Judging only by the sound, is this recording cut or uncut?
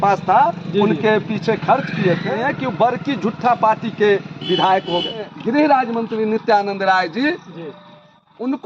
cut